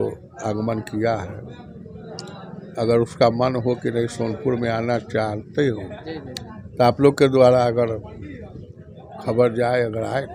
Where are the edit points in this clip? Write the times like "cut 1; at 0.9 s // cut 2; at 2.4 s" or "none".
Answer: none